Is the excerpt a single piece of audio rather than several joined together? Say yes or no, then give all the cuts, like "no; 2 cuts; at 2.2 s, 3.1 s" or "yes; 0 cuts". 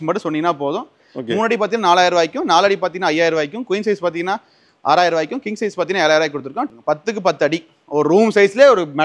no; 2 cuts; at 1.0 s, 6.7 s